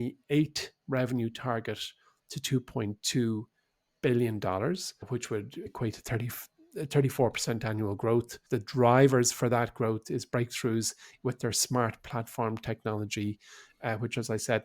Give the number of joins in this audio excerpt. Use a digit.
2